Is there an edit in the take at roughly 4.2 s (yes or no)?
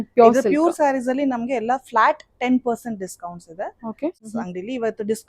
yes